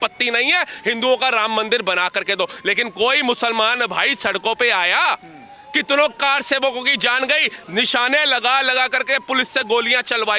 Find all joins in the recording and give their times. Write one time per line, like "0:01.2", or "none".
none